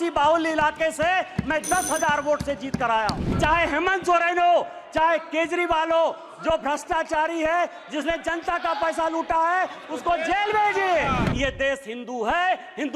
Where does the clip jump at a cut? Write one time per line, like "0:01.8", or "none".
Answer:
0:03.3
0:11.3